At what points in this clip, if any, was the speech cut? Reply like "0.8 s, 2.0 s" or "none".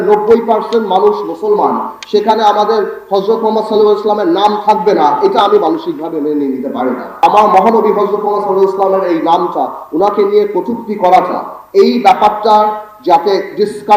7.2 s